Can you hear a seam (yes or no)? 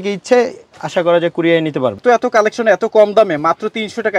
yes